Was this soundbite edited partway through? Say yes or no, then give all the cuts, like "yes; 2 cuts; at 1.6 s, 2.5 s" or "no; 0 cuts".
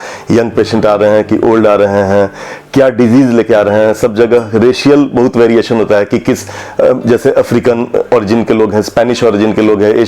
no; 0 cuts